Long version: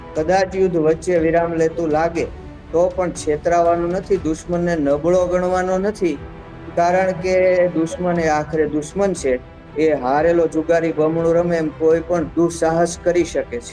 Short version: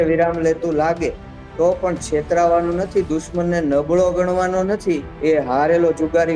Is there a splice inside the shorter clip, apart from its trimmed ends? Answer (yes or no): yes